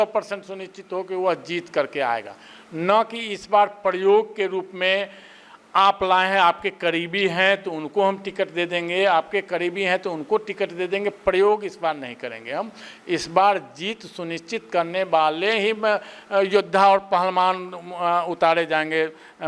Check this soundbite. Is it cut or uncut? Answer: uncut